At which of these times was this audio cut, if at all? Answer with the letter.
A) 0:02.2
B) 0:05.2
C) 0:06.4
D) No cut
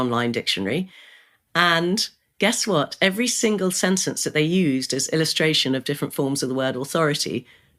D